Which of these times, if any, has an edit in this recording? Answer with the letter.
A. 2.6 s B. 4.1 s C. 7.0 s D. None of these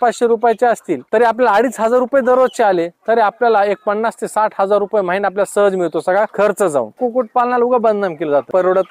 C